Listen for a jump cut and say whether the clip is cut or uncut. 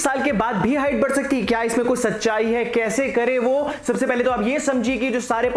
uncut